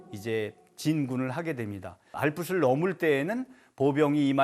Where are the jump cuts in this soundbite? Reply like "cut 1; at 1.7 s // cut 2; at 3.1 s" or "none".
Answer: cut 1; at 2.1 s